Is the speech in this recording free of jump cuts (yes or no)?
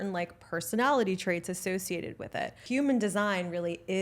no